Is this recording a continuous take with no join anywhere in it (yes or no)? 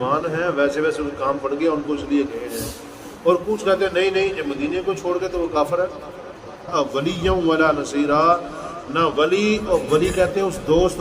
no